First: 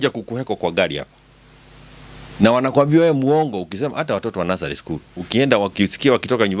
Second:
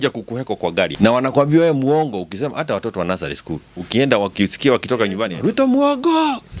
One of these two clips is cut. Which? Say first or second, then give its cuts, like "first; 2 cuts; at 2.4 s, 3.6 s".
second; 2 cuts; at 0.9 s, 5.3 s